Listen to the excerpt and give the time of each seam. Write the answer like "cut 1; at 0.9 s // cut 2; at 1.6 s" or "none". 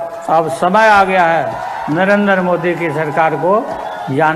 none